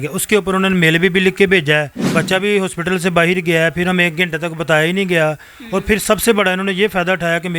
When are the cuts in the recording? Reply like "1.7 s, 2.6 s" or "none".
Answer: 2.0 s